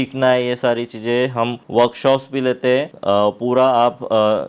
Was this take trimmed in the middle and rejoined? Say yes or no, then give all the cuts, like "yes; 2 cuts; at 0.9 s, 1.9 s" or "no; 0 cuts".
yes; 2 cuts; at 1.6 s, 2.9 s